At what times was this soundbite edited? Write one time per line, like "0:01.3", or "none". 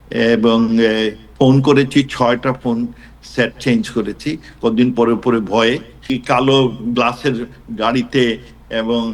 0:01.2
0:06.1